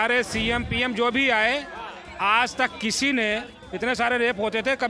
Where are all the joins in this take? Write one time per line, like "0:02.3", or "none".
0:03.6

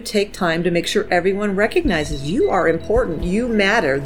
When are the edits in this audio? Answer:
none

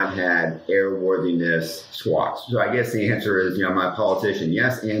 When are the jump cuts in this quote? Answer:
none

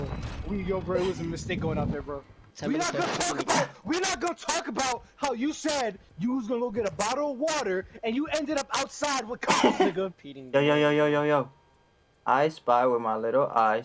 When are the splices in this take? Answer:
0:02.4
0:06.0
0:10.1

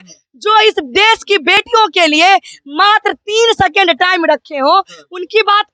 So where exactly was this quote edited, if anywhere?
none

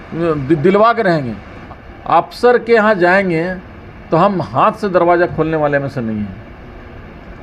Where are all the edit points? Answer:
0:01.5

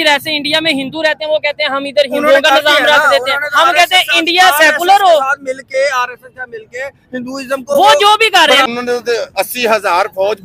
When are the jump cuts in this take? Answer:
0:08.6

